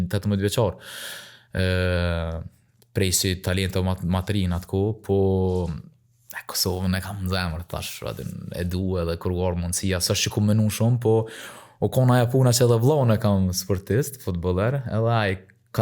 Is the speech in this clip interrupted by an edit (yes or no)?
no